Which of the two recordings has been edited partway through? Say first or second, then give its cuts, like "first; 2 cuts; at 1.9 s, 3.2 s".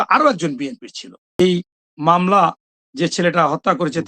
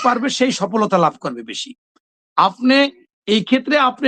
first; 1 cut; at 1.3 s